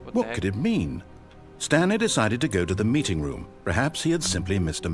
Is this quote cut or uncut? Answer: cut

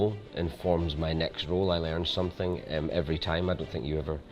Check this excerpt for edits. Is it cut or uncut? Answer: uncut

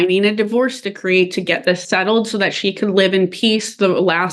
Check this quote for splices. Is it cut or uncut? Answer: uncut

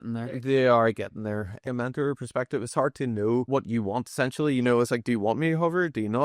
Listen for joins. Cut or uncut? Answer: cut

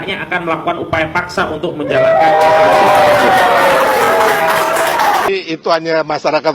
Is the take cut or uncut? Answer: cut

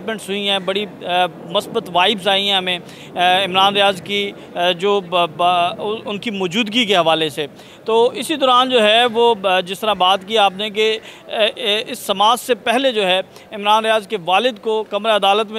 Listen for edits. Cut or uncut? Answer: uncut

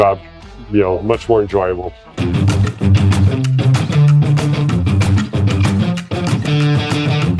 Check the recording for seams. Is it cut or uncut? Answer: cut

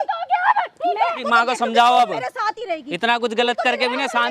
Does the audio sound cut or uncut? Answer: cut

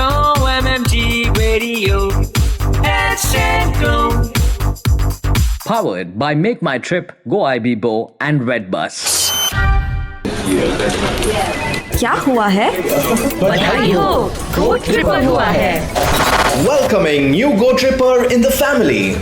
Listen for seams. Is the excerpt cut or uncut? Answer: cut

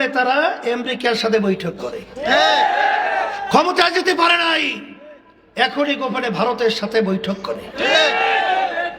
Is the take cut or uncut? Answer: uncut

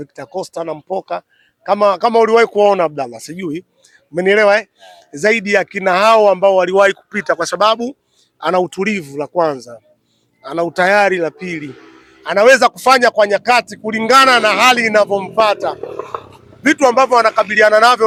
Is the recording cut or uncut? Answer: uncut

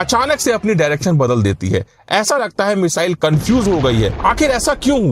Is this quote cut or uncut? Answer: cut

